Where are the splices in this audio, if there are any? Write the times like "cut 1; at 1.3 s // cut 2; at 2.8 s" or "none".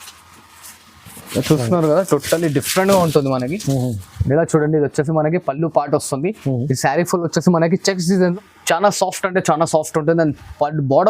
cut 1; at 8.3 s